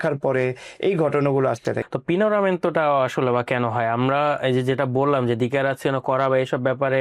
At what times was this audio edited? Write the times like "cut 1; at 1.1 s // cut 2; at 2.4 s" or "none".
cut 1; at 1.8 s